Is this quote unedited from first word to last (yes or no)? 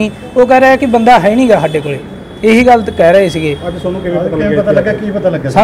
yes